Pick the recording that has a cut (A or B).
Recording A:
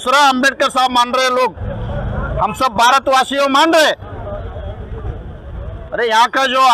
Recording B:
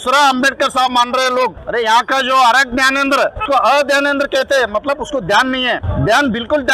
B